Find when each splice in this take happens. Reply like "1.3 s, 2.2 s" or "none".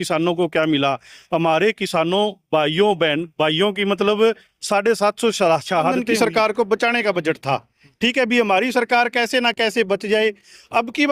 6.0 s